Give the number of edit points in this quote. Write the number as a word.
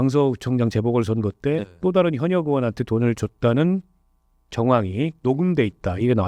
zero